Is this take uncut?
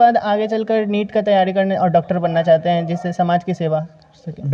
yes; 0 cuts

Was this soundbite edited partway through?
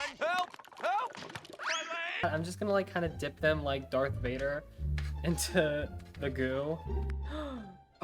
yes; 2 cuts; at 2.2 s, 7.1 s

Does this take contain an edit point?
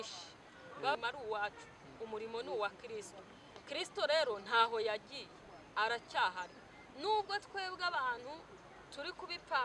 yes; 1 cut; at 0.9 s

